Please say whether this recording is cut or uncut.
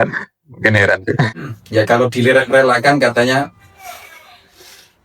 cut